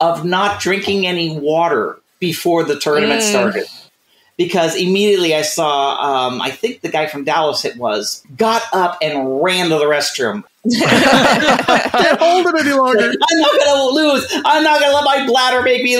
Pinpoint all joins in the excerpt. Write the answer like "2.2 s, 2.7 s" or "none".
12.7 s